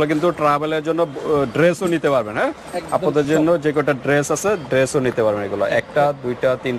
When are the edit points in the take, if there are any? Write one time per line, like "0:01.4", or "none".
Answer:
none